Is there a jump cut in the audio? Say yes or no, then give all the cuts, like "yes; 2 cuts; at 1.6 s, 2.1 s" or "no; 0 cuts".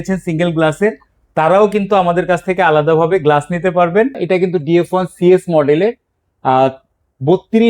yes; 1 cut; at 4.2 s